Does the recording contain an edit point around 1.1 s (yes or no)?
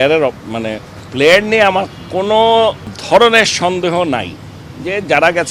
no